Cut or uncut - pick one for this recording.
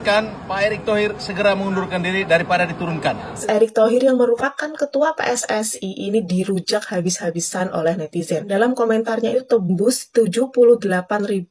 cut